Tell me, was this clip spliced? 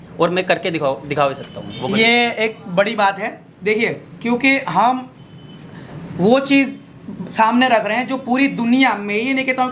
no; 0 cuts

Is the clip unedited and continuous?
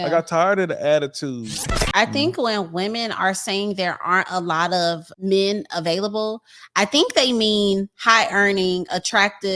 no; 1 cut; at 1.8 s

